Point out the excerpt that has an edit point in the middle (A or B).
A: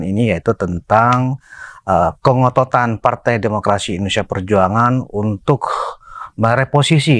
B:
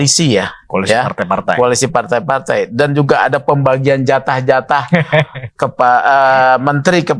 B